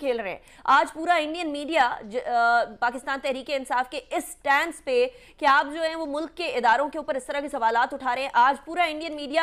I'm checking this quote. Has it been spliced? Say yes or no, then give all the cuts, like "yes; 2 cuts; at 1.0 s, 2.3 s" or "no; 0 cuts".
no; 0 cuts